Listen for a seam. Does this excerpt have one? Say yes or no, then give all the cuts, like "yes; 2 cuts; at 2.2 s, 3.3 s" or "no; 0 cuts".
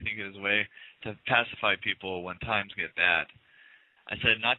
no; 0 cuts